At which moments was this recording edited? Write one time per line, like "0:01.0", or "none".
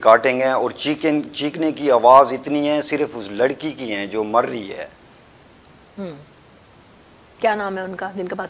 none